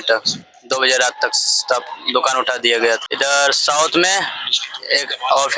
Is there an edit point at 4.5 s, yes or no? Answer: no